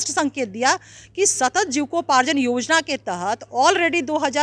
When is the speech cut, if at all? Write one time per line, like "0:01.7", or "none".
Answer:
none